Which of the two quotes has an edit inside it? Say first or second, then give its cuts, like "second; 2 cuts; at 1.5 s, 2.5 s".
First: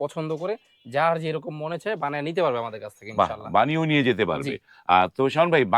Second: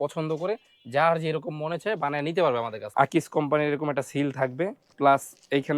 second; 2 cuts; at 2.8 s, 4.9 s